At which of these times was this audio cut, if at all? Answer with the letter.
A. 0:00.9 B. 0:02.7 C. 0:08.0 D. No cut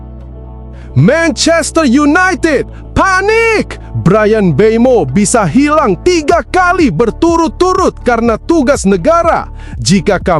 A